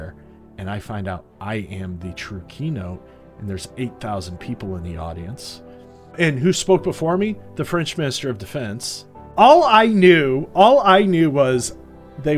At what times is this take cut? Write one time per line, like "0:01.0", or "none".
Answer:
0:06.2
0:09.2

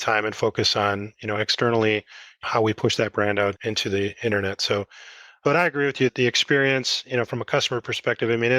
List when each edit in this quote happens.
none

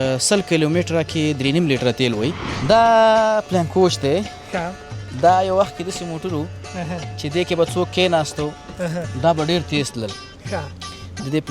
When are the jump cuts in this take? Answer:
0:02.5

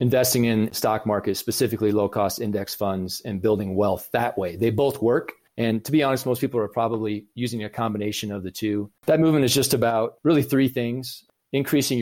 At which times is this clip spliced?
0:05.4
0:08.9

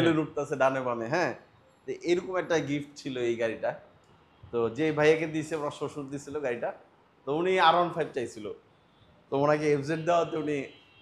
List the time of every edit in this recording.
none

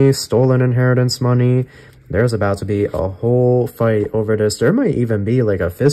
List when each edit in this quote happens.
none

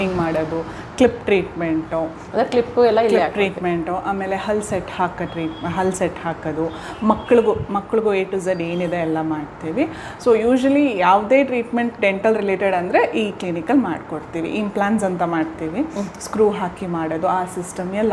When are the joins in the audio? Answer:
none

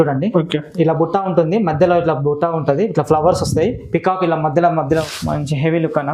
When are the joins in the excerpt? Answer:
0:05.1

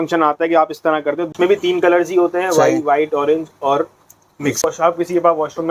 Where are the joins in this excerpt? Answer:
0:01.3
0:04.6

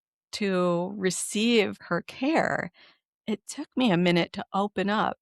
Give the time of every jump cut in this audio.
0:01.8

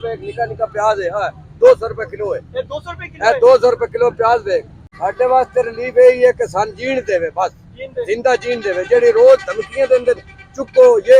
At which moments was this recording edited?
none

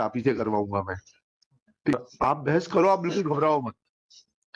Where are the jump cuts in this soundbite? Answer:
0:01.9

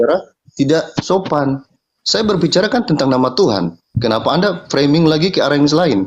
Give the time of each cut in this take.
none

